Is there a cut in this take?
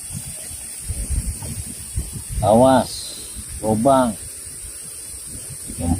no; 0 cuts

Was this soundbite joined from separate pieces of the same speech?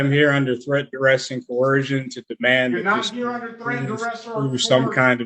no; 0 cuts

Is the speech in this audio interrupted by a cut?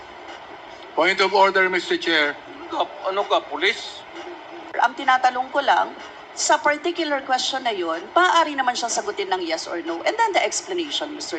yes; 1 cut; at 4.7 s

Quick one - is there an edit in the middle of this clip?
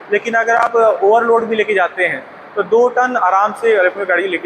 no; 0 cuts

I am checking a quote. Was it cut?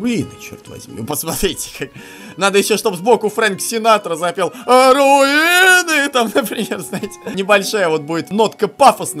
yes; 2 cuts; at 7.2 s, 8.3 s

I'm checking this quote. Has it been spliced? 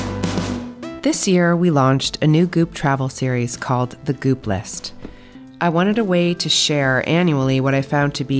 yes; 1 cut; at 0.9 s

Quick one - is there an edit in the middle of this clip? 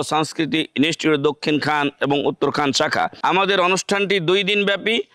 yes; 1 cut; at 3.1 s

